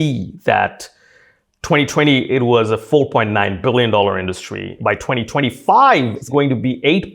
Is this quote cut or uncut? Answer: cut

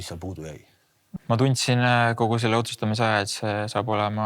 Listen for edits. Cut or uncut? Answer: cut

